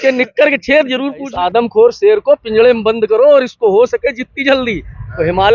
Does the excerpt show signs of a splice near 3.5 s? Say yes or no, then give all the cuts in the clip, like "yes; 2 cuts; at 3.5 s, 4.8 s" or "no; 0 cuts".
no; 1 cut; at 1.3 s